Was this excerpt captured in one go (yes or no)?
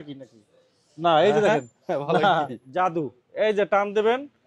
no